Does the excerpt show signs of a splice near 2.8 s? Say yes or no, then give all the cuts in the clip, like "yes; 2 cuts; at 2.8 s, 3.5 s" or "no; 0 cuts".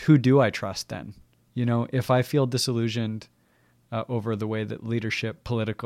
no; 1 cut; at 1.6 s